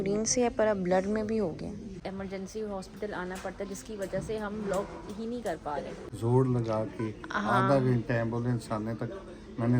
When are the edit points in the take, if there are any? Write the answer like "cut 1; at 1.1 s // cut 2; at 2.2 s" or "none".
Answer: cut 1; at 2.0 s // cut 2; at 6.0 s